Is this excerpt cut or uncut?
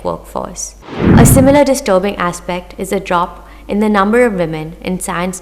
cut